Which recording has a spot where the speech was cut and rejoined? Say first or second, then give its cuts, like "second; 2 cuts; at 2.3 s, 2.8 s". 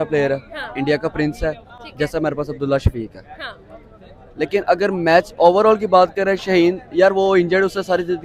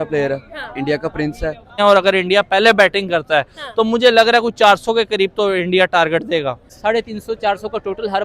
second; 2 cuts; at 1.7 s, 6.7 s